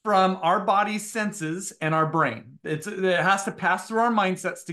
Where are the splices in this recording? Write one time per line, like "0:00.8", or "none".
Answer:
none